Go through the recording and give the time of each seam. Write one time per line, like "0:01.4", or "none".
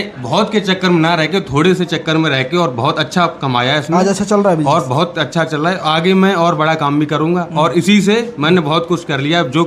none